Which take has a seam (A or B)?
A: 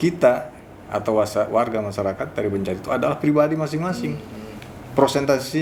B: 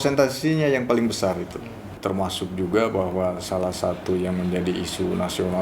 B